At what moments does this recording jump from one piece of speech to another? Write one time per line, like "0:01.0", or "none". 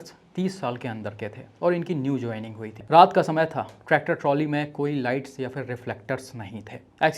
0:02.7